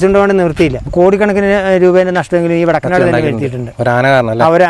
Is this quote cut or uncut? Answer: cut